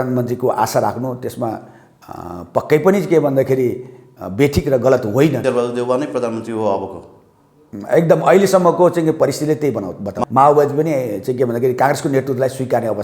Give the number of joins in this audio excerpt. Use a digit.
2